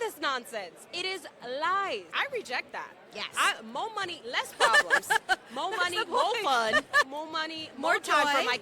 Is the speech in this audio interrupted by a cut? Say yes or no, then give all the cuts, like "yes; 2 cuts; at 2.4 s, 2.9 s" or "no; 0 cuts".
yes; 2 cuts; at 2.1 s, 7.1 s